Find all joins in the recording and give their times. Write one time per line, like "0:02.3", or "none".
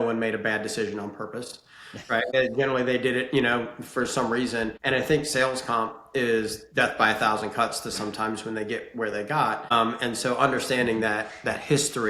0:02.3
0:04.8
0:09.7